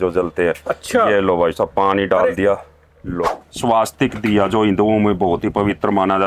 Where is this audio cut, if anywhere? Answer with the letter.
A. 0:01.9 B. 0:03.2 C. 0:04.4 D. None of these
B